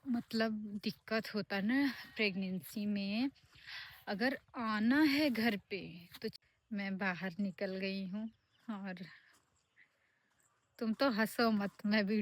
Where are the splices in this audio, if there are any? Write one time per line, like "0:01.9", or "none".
0:06.4

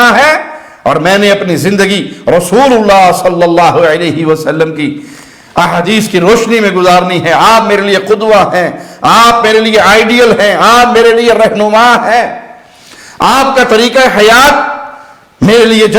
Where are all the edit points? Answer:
none

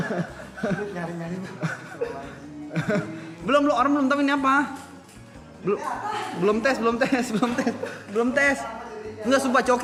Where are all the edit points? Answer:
none

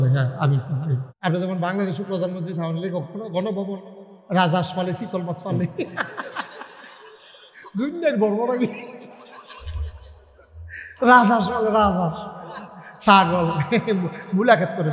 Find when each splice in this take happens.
0:01.1

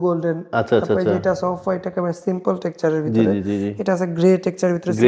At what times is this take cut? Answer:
none

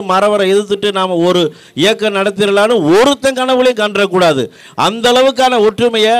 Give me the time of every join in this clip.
none

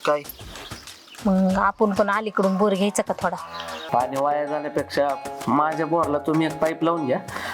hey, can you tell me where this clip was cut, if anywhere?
0:03.8

